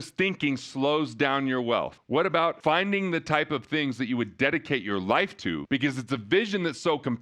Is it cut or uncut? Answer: cut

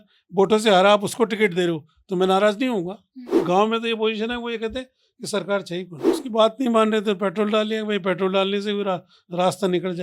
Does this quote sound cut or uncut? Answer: cut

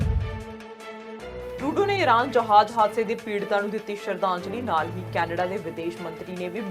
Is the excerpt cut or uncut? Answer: uncut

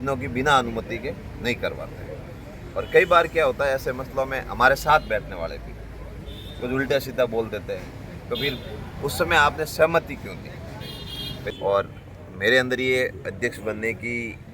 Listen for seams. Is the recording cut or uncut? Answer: cut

